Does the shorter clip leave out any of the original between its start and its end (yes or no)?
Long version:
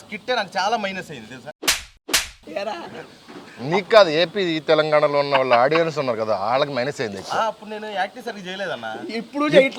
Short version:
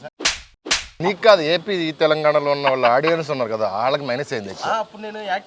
yes